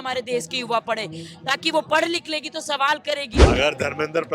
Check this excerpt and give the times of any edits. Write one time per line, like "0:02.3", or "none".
0:03.3